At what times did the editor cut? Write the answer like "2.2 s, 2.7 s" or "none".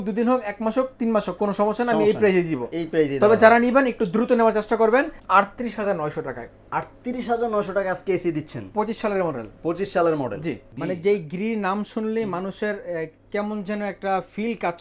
5.2 s, 10.7 s